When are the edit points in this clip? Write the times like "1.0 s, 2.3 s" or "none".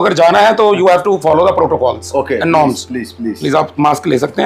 none

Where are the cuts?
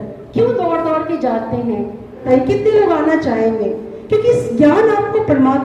2.2 s

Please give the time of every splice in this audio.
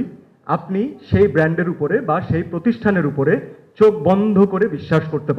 none

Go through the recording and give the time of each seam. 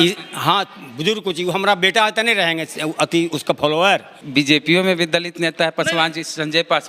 4.2 s

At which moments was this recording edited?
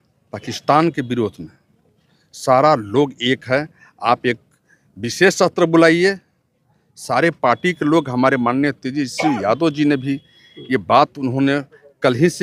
none

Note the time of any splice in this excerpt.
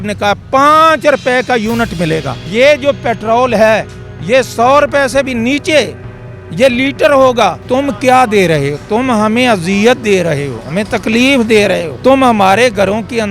2.4 s, 7.6 s, 11.9 s

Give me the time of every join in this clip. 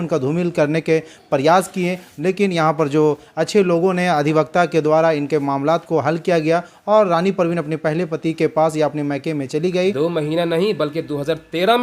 10.0 s

